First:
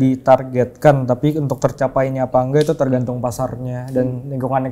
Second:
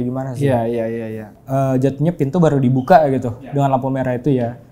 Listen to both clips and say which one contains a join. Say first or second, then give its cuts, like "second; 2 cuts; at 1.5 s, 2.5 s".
second; 1 cut; at 1.3 s